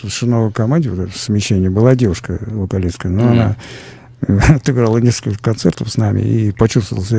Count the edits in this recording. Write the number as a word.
zero